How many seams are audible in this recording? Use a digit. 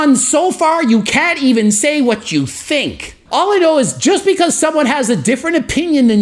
1